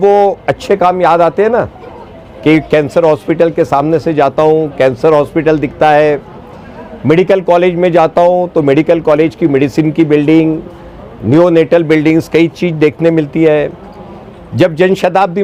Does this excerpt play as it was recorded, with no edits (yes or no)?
yes